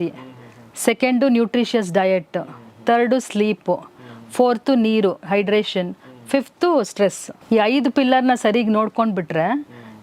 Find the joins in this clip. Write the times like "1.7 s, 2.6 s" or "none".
7.3 s